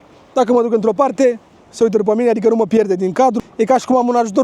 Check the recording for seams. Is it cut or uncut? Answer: cut